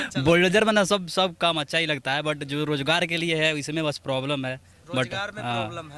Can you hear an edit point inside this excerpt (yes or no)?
no